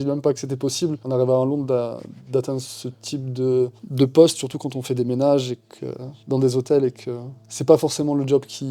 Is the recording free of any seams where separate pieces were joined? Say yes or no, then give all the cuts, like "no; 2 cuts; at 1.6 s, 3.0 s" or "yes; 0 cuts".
yes; 0 cuts